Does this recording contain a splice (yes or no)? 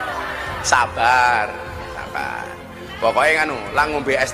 no